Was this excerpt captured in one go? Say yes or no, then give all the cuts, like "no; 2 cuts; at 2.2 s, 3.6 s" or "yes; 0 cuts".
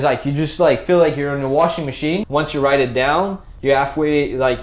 no; 1 cut; at 2.2 s